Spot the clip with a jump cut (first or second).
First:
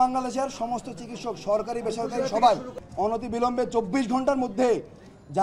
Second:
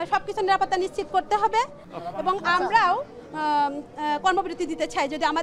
second